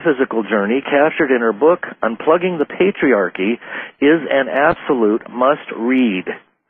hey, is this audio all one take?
yes; 0 cuts

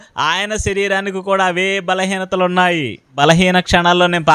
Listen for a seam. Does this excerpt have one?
yes; 1 cut; at 3.1 s

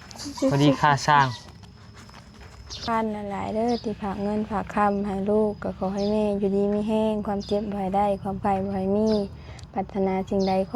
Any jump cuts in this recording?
yes; 1 cut; at 2.8 s

